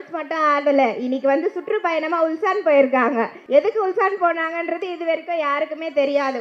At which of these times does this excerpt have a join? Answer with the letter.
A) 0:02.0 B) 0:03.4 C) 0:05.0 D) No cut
B